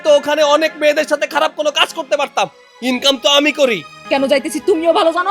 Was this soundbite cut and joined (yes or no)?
yes